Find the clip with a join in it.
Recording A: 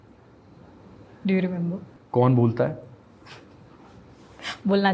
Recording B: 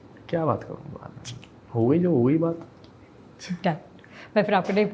A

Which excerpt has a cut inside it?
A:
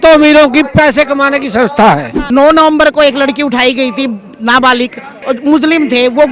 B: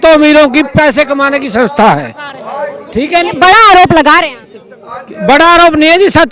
A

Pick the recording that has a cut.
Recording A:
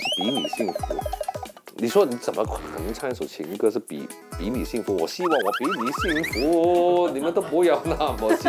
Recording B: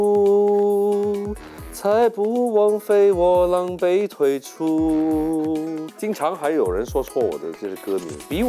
B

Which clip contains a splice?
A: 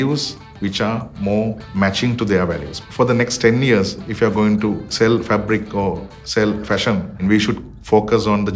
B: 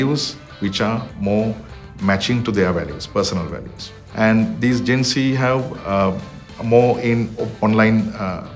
A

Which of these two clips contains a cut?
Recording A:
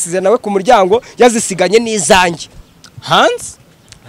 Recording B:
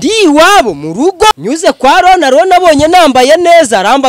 B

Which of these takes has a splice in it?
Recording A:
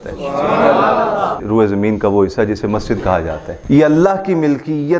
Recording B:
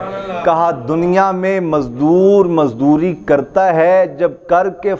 A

